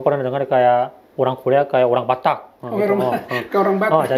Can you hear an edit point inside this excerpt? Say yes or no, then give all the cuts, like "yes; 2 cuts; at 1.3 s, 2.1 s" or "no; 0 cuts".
no; 0 cuts